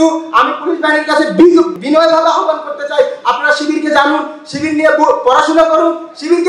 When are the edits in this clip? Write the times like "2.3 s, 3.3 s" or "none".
1.7 s